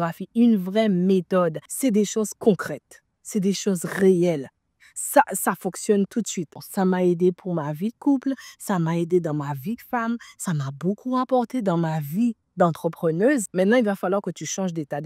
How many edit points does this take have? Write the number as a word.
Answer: three